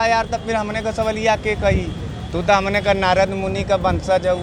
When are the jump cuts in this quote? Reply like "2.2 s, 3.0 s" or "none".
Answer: none